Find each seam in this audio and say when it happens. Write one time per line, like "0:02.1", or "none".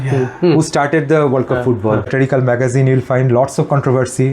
0:02.1

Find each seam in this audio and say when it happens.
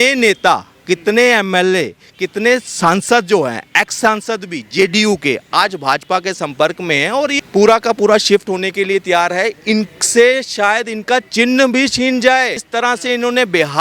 0:07.4
0:12.6

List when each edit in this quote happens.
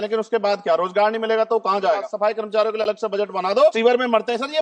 0:02.1
0:03.8

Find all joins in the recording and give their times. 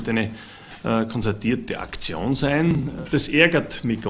0:02.9

